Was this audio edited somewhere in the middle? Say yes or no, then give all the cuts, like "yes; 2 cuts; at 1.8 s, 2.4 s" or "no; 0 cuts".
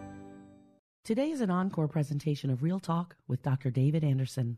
no; 0 cuts